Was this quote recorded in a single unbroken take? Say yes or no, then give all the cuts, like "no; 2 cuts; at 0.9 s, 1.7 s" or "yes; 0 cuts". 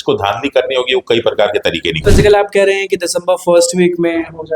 no; 1 cut; at 2.0 s